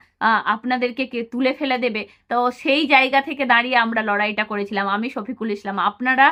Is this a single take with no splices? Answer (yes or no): yes